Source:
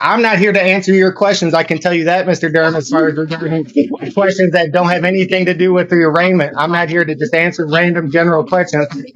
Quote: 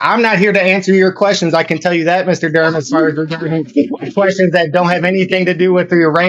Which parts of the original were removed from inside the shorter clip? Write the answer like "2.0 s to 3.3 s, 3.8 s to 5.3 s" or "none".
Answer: none